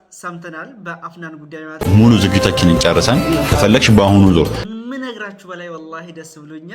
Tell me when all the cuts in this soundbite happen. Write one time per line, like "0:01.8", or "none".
0:01.9
0:04.6